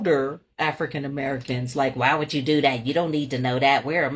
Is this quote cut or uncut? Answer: uncut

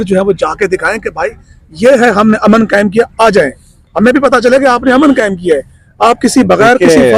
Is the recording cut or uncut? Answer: uncut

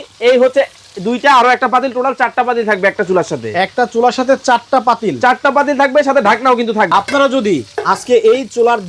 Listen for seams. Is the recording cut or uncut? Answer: cut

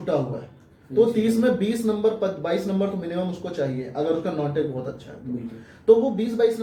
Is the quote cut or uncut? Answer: uncut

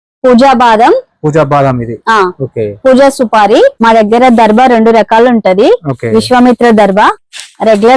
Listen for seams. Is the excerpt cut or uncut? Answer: cut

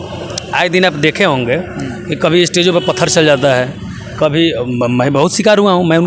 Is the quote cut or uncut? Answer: uncut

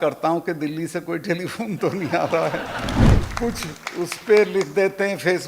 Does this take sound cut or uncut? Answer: cut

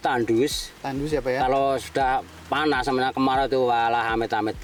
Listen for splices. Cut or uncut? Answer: uncut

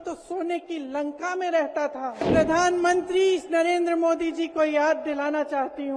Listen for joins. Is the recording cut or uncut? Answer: cut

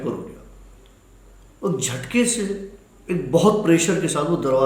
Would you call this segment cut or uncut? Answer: uncut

